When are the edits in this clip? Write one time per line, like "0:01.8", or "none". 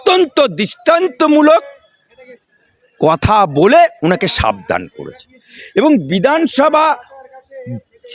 0:05.7